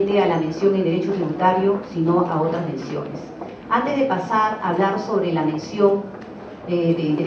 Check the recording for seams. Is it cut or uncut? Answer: uncut